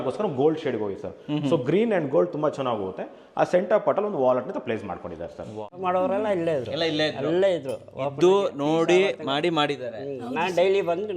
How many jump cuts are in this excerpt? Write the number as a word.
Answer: one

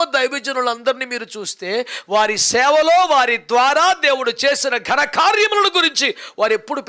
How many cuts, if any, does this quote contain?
zero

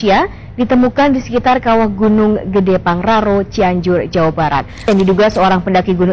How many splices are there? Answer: one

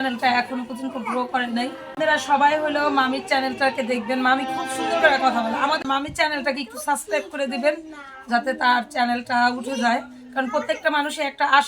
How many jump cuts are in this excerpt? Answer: two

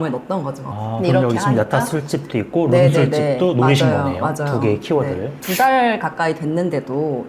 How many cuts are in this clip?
one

